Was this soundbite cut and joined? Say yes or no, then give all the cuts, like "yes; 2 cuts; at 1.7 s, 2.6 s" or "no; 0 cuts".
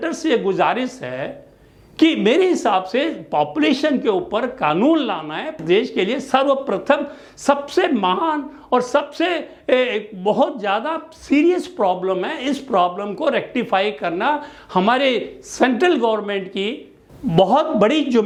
no; 0 cuts